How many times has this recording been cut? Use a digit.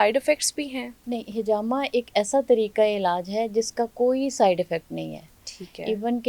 0